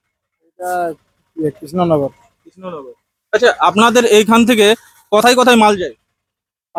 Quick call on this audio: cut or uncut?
uncut